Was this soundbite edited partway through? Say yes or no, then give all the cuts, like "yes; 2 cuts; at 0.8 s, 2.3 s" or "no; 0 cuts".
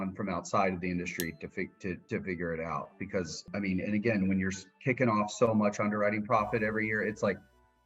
yes; 2 cuts; at 2.0 s, 3.5 s